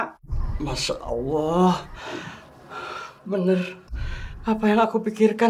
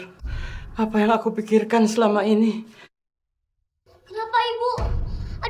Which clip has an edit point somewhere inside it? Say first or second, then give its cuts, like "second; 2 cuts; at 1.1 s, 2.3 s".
second; 1 cut; at 3.7 s